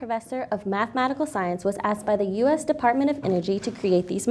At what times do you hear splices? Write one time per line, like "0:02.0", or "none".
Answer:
none